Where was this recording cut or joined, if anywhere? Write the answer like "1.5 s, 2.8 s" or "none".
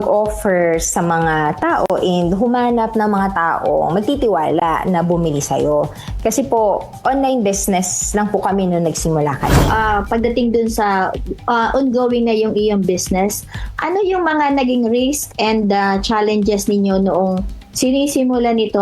9.6 s